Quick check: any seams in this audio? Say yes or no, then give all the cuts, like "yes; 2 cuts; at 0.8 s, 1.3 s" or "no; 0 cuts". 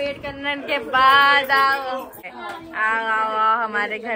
yes; 1 cut; at 2.2 s